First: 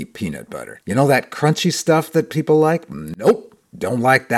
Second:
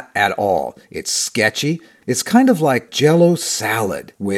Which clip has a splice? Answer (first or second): second